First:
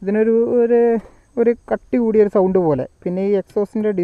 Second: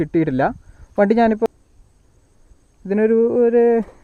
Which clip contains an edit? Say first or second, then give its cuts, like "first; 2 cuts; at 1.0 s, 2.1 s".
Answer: second; 1 cut; at 1.5 s